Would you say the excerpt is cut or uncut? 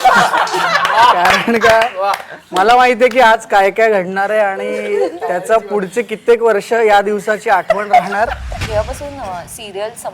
cut